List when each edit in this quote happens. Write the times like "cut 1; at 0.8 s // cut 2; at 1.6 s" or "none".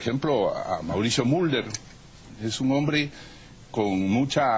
none